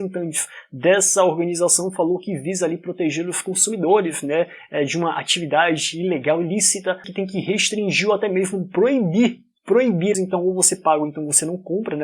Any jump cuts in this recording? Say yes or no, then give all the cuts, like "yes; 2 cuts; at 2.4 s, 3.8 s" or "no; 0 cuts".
yes; 2 cuts; at 7.1 s, 10.1 s